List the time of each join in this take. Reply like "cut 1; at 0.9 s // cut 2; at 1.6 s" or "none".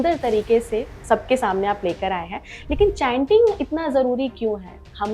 cut 1; at 0.9 s